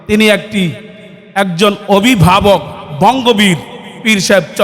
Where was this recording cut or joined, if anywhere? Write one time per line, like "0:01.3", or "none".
none